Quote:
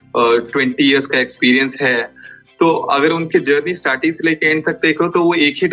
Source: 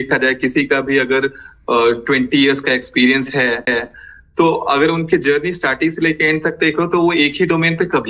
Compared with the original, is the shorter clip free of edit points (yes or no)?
no